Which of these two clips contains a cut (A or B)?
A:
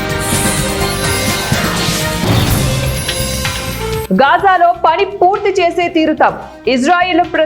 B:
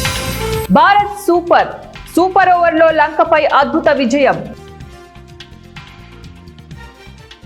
A